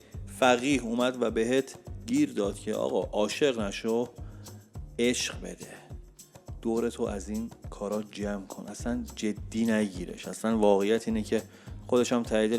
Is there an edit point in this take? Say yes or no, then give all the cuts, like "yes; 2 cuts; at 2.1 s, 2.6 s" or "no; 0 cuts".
no; 0 cuts